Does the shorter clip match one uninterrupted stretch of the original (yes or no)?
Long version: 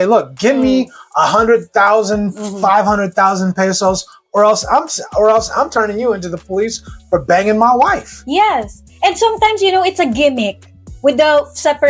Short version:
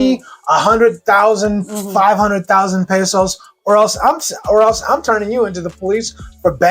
yes